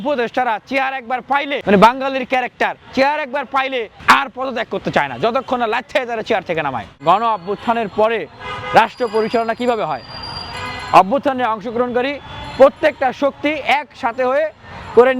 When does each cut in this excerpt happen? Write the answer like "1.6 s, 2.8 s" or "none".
1.6 s, 3.9 s, 6.9 s